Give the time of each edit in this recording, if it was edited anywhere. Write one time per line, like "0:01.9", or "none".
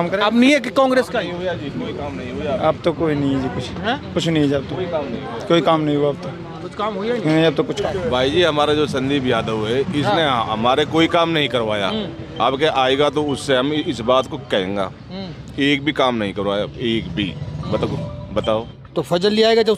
0:07.8
0:18.8